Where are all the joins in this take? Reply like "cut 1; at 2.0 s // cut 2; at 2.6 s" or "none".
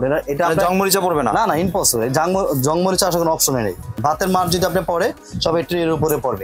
cut 1; at 4.0 s